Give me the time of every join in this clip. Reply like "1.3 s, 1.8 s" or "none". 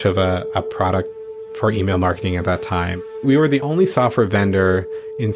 3.0 s